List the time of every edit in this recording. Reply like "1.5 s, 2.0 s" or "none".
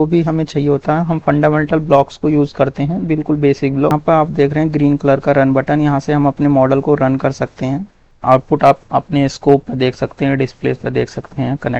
4.0 s, 8.0 s

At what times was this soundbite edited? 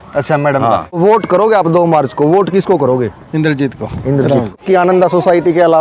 0.9 s, 4.5 s

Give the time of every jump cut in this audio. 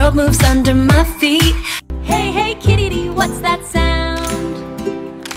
1.6 s

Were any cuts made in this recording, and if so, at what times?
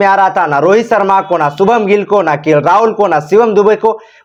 none

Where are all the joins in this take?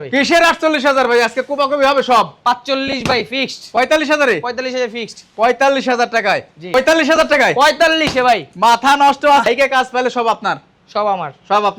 none

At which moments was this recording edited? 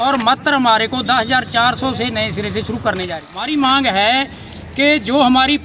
3.0 s

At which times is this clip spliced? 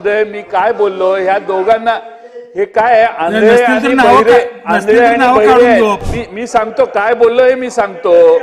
6.1 s

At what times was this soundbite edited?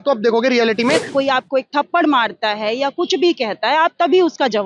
1.1 s

